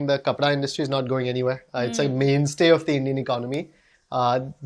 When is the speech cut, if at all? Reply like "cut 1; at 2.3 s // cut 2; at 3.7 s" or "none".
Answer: none